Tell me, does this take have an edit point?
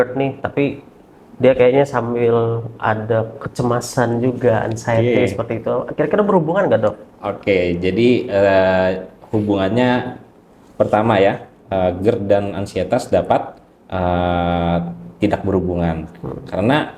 no; 0 cuts

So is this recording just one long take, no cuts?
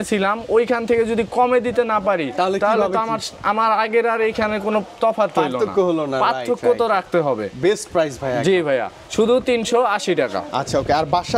yes; 0 cuts

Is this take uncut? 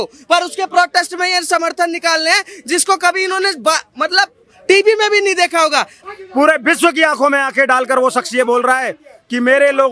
no; 1 cut; at 5.9 s

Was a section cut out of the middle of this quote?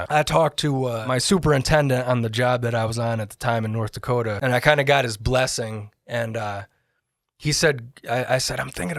yes; 2 cuts; at 1.1 s, 4.4 s

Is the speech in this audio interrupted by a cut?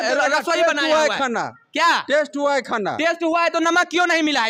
no; 0 cuts

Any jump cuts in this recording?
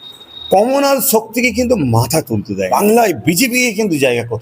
yes; 1 cut; at 2.7 s

